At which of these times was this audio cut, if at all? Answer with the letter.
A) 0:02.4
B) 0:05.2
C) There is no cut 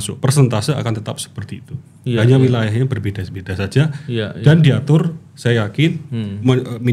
C